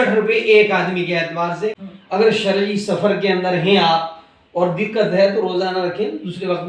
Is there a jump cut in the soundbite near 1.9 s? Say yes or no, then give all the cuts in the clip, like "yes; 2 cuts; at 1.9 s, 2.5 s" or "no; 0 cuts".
yes; 1 cut; at 1.9 s